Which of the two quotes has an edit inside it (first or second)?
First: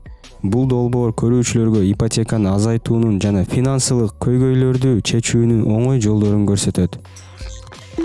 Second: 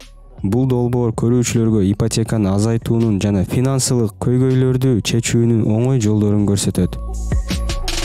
first